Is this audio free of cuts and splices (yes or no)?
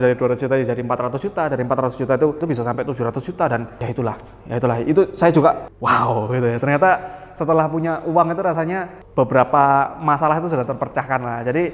no